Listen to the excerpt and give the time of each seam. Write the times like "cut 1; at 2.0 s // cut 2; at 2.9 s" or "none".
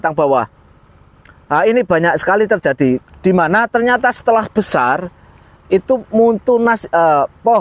cut 1; at 3.0 s